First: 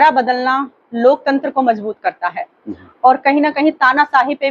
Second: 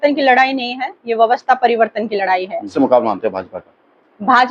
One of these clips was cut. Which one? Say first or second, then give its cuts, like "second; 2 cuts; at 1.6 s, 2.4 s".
second; 1 cut; at 2.6 s